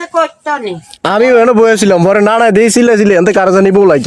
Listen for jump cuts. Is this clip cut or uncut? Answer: uncut